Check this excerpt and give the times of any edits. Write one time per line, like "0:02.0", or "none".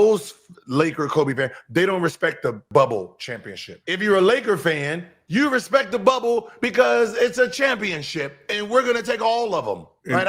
0:02.6
0:05.2

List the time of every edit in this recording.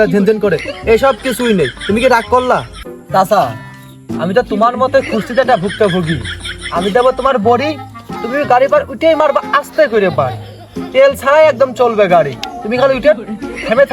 0:02.7

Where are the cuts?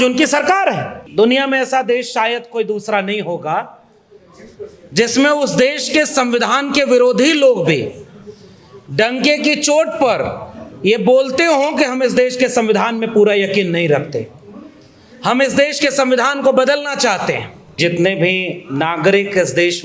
0:01.0
0:17.8

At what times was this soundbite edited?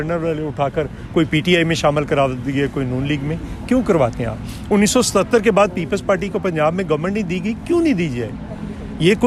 none

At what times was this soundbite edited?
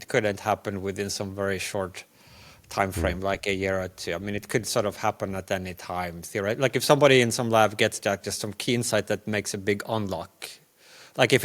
none

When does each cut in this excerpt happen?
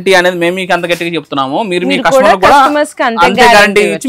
none

